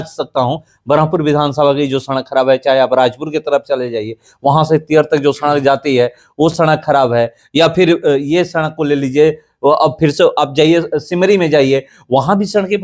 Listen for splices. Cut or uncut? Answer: uncut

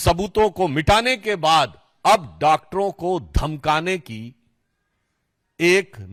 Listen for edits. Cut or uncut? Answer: uncut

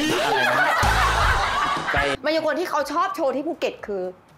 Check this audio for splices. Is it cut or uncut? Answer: cut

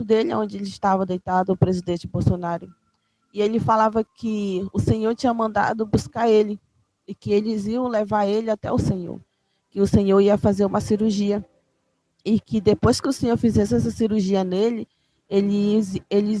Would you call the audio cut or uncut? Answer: uncut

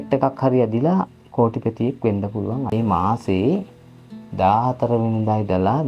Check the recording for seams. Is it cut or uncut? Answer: cut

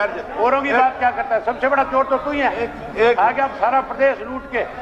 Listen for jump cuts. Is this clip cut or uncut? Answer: uncut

